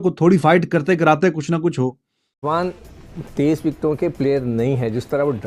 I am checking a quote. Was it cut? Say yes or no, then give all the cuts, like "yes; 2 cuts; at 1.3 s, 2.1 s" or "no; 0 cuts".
yes; 1 cut; at 2.4 s